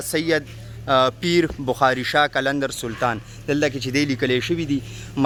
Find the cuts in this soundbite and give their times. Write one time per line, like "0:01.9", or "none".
none